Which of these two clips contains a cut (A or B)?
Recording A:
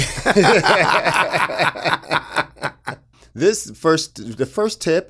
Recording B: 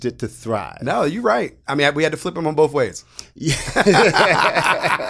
A